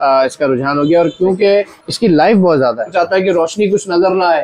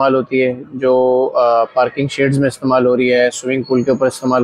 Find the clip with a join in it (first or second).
first